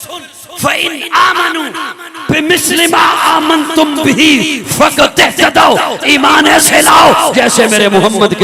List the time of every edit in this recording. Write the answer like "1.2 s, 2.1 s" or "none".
none